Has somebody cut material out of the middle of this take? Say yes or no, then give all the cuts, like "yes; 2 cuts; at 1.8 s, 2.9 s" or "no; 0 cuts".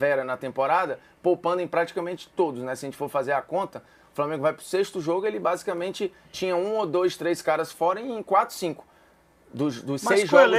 no; 0 cuts